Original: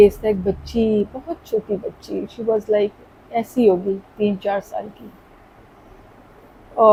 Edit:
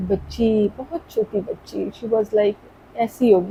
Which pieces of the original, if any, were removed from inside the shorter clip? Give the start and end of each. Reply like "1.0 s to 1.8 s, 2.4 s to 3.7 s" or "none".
none